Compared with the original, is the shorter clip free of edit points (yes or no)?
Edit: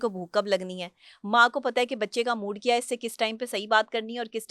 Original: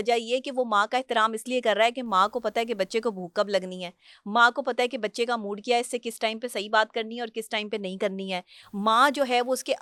yes